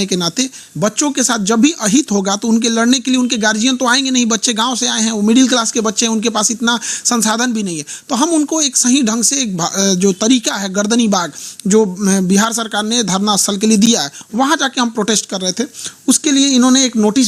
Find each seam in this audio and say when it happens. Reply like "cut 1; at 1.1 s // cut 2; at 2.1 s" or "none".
none